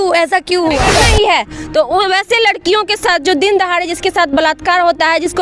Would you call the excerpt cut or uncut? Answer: cut